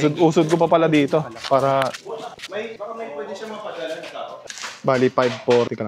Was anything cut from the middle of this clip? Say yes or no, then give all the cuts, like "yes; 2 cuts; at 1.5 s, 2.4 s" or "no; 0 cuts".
yes; 2 cuts; at 2.1 s, 4.6 s